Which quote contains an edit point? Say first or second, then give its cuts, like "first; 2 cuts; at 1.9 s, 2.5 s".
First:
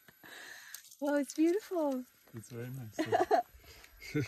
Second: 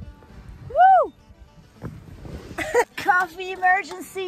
second; 1 cut; at 2.9 s